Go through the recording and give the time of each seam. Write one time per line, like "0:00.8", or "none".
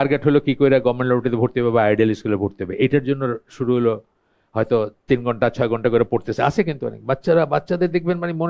none